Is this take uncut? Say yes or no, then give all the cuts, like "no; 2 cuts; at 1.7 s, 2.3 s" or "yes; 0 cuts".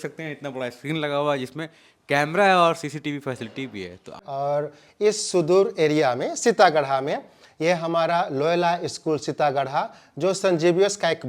no; 1 cut; at 4.2 s